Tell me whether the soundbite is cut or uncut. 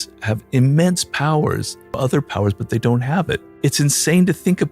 cut